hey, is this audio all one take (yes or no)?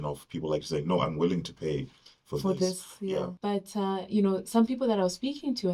no